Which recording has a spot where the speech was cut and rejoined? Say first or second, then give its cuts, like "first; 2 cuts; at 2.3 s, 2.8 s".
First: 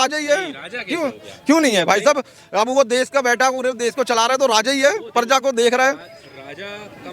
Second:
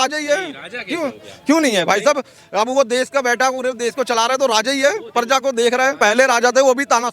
second; 1 cut; at 6.0 s